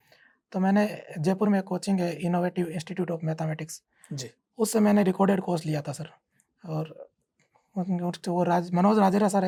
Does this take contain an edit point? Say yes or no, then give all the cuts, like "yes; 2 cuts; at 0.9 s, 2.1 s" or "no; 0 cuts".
no; 0 cuts